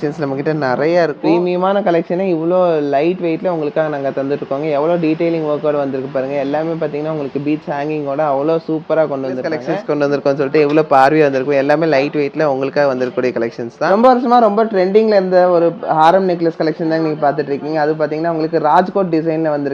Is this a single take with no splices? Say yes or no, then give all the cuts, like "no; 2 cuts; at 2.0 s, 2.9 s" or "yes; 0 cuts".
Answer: no; 3 cuts; at 1.2 s, 9.7 s, 13.8 s